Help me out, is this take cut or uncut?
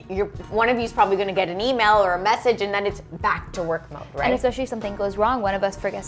uncut